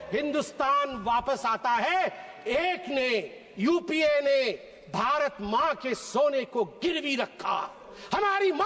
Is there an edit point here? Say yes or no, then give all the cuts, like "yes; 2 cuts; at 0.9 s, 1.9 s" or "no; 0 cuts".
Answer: no; 0 cuts